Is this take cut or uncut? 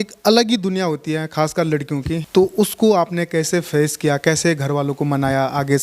cut